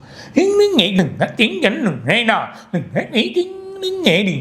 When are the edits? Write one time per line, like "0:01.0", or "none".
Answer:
0:01.0